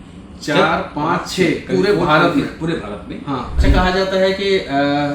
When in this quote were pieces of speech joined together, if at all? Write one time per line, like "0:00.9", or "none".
0:03.5